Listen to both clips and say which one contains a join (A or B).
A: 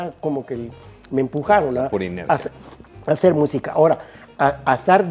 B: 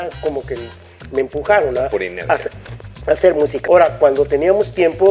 B